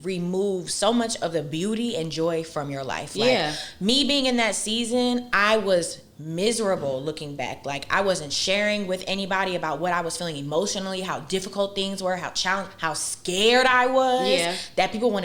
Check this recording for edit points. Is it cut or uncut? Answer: uncut